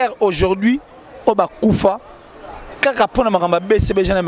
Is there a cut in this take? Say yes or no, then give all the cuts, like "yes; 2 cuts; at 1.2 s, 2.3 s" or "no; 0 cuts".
no; 0 cuts